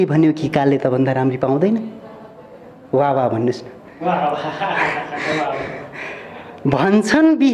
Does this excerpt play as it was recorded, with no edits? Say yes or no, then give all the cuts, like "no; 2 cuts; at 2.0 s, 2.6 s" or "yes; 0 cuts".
yes; 0 cuts